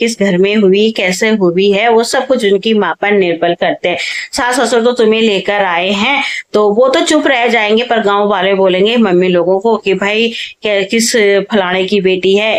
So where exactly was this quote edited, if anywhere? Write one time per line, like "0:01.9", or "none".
none